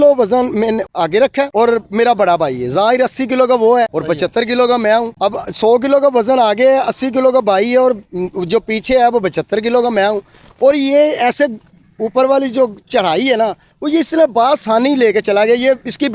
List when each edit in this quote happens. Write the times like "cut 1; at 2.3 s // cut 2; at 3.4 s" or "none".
none